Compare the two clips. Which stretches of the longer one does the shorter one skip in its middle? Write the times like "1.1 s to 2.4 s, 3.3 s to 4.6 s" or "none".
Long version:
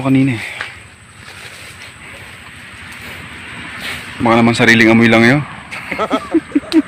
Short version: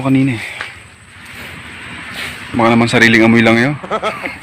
1.1 s to 2.8 s